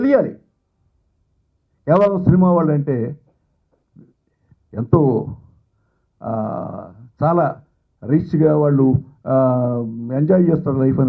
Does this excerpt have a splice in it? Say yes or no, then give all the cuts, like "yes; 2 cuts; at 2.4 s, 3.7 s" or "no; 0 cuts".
no; 0 cuts